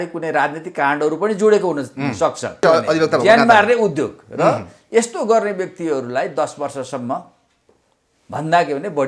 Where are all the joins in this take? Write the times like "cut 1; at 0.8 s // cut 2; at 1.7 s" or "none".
cut 1; at 2.6 s